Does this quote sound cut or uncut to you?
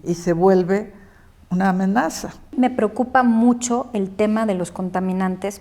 cut